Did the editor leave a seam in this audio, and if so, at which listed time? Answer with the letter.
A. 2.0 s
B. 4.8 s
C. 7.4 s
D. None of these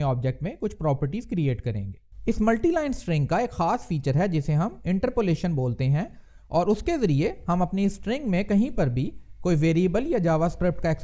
A